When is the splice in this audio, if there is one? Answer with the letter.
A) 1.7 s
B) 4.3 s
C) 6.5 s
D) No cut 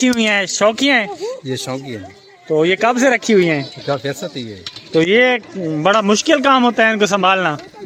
D